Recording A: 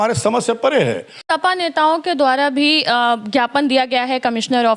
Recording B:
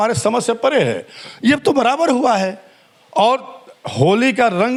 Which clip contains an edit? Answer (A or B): A